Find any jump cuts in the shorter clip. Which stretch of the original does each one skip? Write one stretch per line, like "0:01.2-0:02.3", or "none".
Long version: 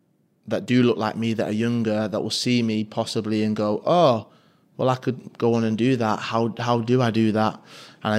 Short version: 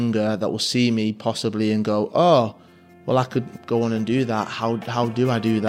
none